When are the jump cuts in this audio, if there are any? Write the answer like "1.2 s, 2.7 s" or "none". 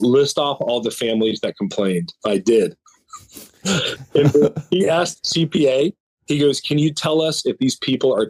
none